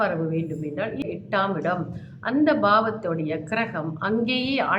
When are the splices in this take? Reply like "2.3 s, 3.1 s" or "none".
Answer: 1.0 s